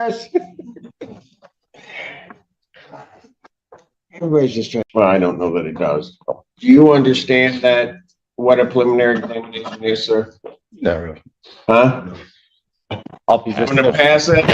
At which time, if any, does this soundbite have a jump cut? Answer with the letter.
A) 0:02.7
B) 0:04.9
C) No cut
B